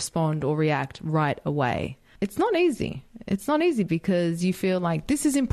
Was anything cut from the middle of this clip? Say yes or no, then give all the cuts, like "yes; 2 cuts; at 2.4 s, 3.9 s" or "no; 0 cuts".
yes; 1 cut; at 2.1 s